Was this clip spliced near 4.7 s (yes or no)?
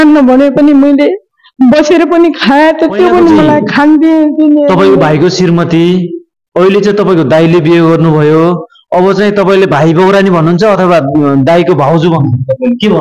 yes